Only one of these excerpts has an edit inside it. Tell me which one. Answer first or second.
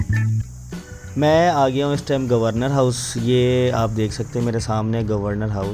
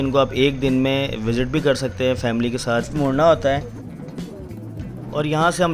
second